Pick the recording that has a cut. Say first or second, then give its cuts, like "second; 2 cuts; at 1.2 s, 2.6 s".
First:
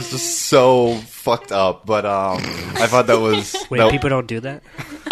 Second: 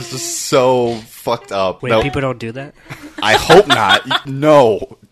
second; 2 cuts; at 1.8 s, 4.2 s